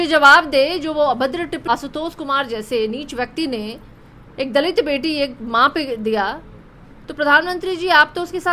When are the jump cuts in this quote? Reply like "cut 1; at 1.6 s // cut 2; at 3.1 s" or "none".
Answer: cut 1; at 1.6 s

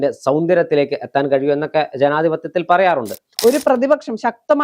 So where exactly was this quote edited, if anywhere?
cut 1; at 3.2 s

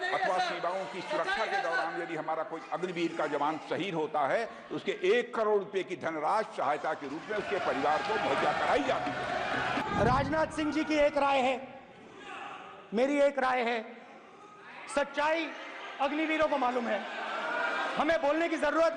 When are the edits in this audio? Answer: cut 1; at 9.8 s

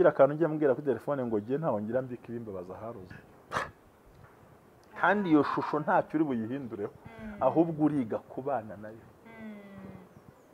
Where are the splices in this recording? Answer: cut 1; at 3.2 s

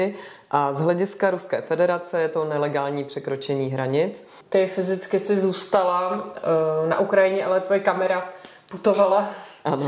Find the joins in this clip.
cut 1; at 4.3 s

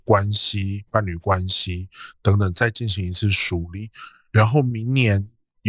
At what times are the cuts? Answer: none

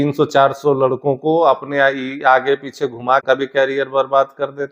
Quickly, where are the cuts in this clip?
cut 1; at 3.2 s

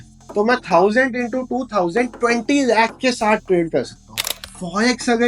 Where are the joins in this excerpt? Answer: cut 1; at 4.3 s

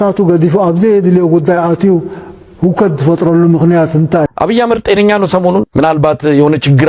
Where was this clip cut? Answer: cut 1; at 4.3 s // cut 2; at 5.6 s

